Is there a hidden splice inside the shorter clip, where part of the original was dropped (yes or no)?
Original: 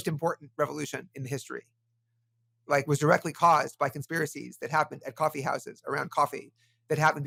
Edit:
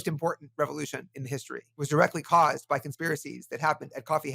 yes